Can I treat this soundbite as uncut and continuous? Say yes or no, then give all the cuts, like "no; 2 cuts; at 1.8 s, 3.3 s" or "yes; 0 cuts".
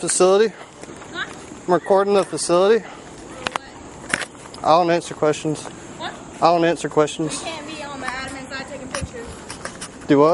yes; 0 cuts